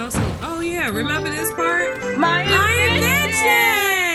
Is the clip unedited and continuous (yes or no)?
yes